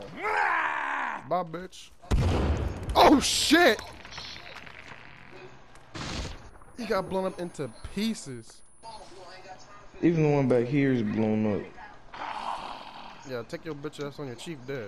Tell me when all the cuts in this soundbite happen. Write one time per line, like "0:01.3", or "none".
none